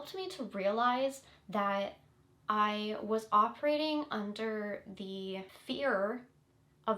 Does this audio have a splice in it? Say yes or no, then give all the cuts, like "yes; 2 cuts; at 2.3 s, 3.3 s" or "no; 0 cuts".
yes; 1 cut; at 5.5 s